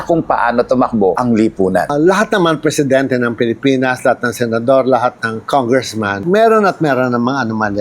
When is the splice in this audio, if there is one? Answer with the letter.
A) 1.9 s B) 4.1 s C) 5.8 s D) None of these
A